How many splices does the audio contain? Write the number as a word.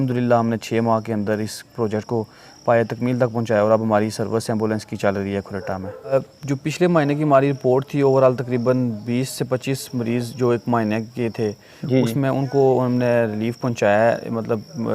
two